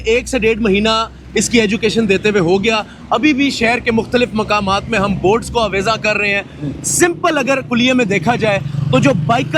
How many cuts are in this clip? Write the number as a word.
zero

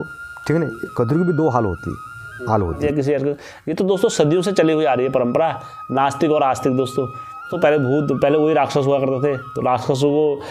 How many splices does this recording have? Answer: two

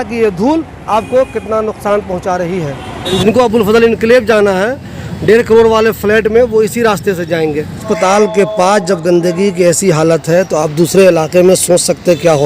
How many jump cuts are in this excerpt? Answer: two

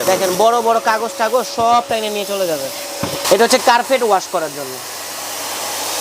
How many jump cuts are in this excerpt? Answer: one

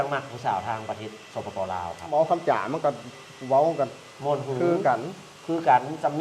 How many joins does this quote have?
one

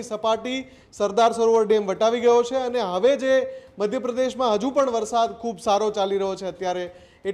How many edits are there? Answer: zero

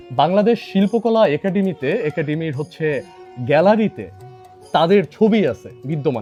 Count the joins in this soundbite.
zero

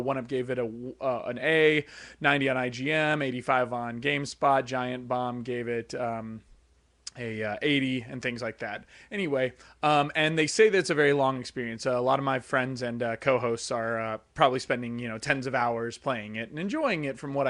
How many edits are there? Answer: one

